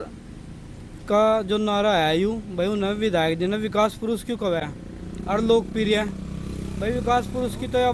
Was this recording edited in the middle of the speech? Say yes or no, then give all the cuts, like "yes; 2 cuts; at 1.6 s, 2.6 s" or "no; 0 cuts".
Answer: no; 0 cuts